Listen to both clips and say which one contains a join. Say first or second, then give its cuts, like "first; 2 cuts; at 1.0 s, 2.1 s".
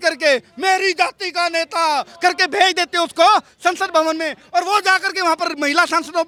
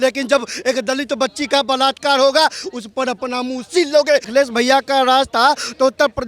second; 1 cut; at 4.3 s